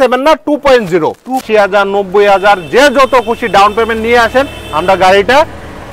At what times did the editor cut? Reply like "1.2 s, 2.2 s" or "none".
1.4 s